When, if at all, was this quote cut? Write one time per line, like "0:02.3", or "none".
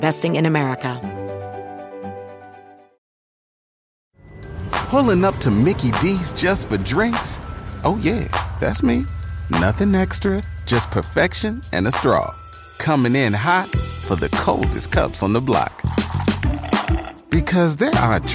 0:01.0